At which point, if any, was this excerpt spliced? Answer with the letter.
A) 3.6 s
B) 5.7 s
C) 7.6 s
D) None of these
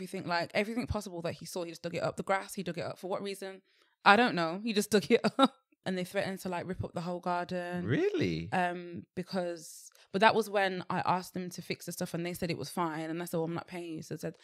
B